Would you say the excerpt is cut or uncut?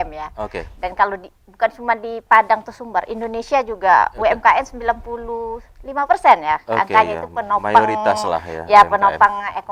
uncut